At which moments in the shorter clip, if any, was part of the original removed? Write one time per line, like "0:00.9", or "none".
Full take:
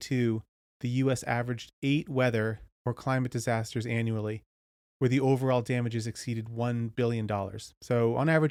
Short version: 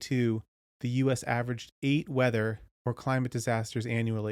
none